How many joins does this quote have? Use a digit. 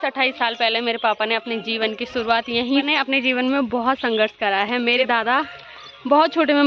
2